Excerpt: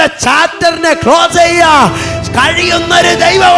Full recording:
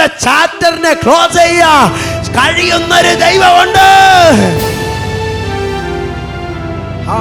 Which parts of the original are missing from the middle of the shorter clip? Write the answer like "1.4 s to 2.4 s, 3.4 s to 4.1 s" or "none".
none